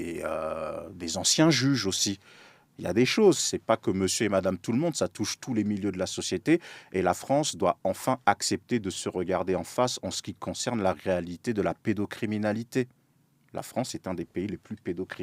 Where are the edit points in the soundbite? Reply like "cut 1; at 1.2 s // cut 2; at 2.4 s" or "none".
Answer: none